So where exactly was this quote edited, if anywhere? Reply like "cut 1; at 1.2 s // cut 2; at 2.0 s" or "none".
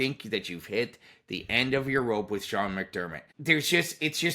cut 1; at 3.2 s